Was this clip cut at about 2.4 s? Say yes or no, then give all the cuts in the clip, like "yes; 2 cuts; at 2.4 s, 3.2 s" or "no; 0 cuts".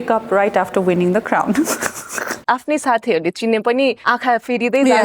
yes; 1 cut; at 2.4 s